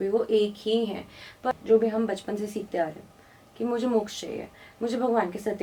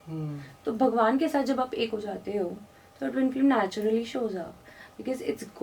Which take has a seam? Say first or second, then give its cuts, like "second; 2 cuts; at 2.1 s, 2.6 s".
first; 1 cut; at 1.5 s